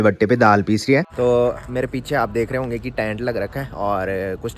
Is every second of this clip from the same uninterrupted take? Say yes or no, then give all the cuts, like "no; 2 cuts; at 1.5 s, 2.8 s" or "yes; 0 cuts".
no; 1 cut; at 1.1 s